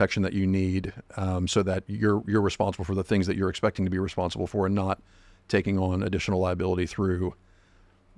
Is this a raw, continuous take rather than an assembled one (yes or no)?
yes